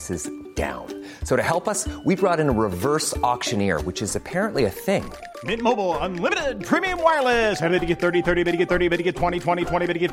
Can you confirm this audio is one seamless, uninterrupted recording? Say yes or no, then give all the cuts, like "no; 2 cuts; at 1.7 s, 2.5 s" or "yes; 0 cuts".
yes; 0 cuts